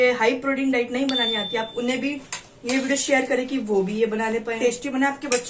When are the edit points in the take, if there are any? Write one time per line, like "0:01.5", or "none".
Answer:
0:04.6